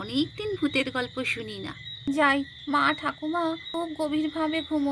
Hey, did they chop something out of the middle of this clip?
yes; 2 cuts; at 1.9 s, 3.6 s

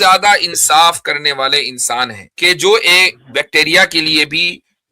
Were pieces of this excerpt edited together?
yes; 1 cut; at 2.2 s

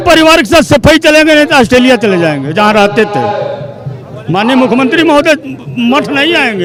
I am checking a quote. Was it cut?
no; 0 cuts

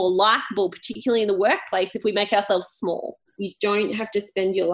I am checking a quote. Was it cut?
yes; 1 cut; at 3.3 s

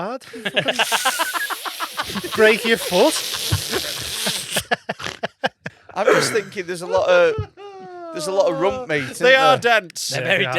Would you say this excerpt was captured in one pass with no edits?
no; 1 cut; at 5.6 s

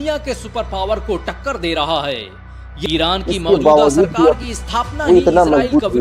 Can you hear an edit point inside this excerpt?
yes; 1 cut; at 2.8 s

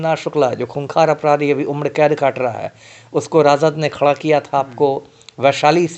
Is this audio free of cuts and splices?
yes; 0 cuts

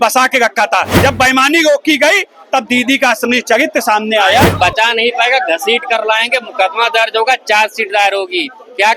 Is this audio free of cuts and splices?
no; 2 cuts; at 1.0 s, 4.5 s

